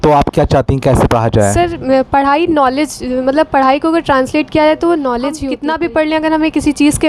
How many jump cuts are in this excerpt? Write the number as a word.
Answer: one